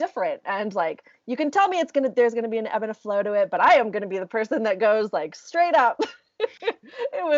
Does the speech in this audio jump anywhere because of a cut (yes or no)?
no